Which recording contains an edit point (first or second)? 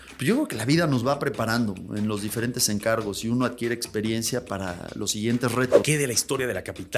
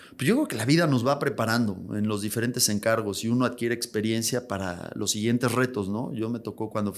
first